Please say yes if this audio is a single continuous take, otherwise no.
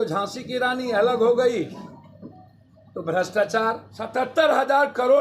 no